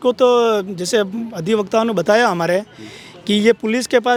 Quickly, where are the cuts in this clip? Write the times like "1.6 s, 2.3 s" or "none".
none